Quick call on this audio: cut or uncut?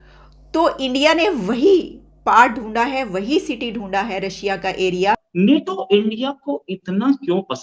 cut